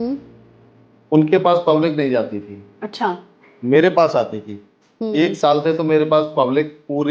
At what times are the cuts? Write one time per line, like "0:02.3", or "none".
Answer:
none